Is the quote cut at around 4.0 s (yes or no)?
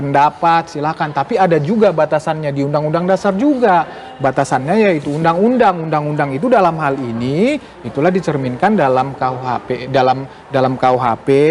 no